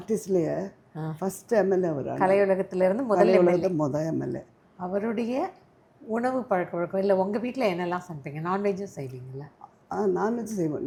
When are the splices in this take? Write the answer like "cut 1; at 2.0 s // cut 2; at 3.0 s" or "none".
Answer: none